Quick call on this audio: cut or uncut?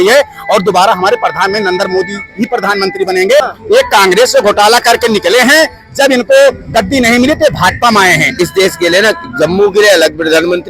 cut